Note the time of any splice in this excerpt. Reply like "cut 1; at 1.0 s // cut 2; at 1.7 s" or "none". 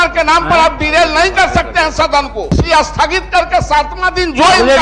cut 1; at 2.4 s